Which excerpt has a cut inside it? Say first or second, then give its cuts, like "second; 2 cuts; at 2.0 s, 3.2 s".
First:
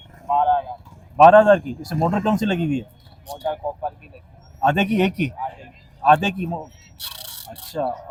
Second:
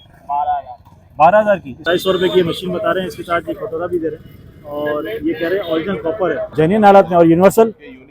second; 2 cuts; at 1.8 s, 6.4 s